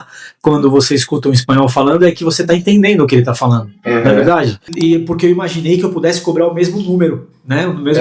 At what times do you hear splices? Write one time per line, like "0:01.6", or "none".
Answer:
0:04.7